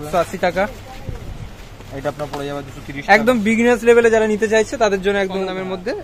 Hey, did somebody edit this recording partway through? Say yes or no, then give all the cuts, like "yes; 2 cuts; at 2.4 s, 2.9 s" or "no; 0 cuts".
no; 0 cuts